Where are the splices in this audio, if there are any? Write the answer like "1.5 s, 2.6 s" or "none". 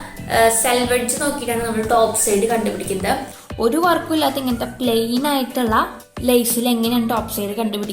3.3 s, 6.0 s